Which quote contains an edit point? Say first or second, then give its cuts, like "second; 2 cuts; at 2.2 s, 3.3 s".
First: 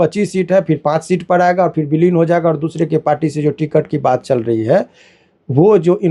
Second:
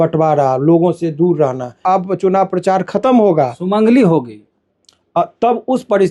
second; 1 cut; at 1.8 s